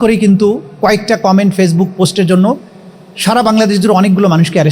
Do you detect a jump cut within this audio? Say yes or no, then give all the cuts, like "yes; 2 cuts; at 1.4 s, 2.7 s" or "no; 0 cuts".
no; 0 cuts